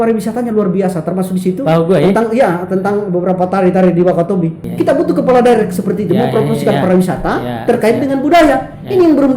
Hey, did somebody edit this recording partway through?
yes; 1 cut; at 4.6 s

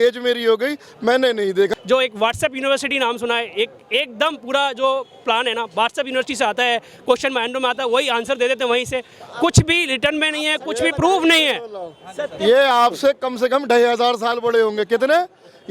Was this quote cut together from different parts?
yes; 1 cut; at 1.7 s

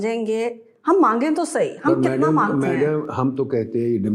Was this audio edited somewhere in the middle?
no; 0 cuts

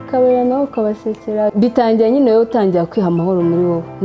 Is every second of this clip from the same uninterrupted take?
no; 1 cut; at 1.5 s

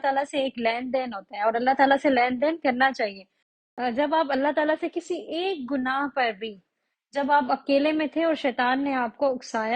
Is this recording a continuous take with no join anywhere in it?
no; 1 cut; at 3.6 s

